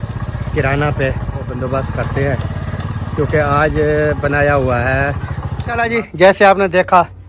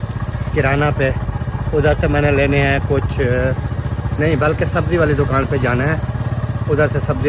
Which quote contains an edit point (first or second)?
first